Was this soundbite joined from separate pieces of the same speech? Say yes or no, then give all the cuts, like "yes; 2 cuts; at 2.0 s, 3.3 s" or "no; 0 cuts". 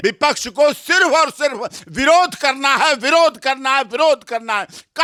no; 0 cuts